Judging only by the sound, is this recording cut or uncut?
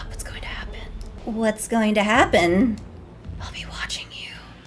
uncut